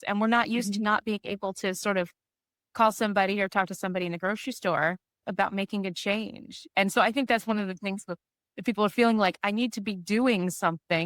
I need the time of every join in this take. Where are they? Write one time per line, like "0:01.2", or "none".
0:05.2